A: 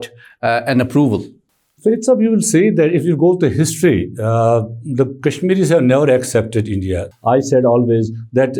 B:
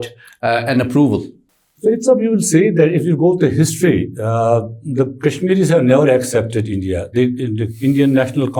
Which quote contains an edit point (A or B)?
A